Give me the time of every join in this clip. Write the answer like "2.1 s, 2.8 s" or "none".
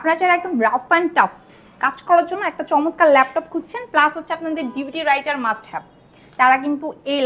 none